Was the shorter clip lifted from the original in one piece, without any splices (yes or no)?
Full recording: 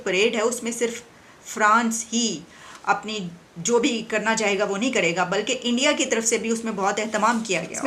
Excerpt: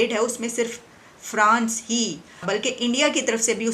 no